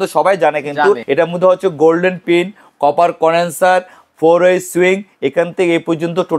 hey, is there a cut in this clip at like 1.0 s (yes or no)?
yes